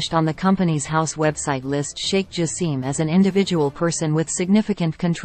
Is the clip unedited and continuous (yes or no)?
yes